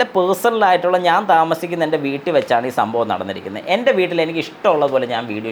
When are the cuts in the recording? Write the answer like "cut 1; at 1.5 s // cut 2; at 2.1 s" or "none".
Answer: none